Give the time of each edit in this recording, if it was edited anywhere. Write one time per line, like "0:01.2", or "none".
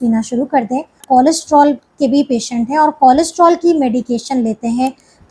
0:01.0